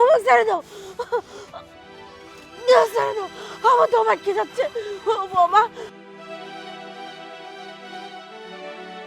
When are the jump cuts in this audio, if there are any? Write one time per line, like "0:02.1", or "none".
0:05.9